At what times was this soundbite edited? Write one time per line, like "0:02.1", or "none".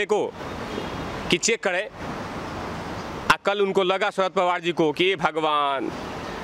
none